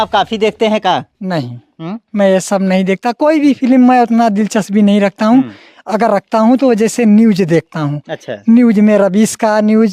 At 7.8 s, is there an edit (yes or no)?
no